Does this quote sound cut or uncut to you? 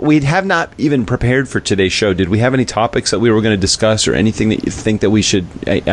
uncut